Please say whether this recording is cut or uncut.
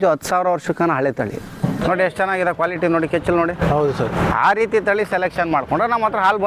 cut